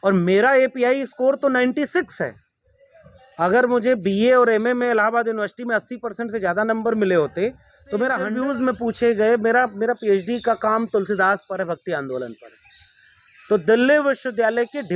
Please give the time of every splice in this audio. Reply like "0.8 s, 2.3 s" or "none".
8.2 s